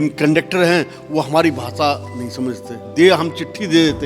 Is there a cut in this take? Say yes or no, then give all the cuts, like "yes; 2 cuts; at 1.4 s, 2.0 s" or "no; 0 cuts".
yes; 1 cut; at 2.8 s